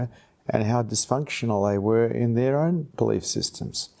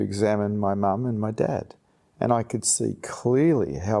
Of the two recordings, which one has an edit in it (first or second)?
first